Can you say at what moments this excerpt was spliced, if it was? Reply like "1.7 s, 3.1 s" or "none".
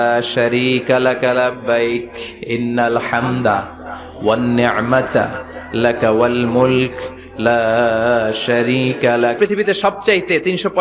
9.4 s